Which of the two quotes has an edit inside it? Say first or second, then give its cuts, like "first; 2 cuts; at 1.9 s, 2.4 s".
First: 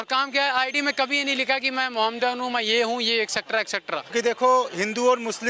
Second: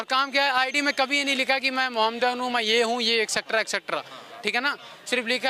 first; 1 cut; at 4.1 s